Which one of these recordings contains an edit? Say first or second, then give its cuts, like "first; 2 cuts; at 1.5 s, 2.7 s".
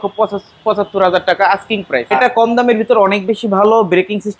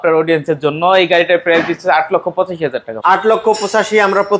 first; 1 cut; at 2.1 s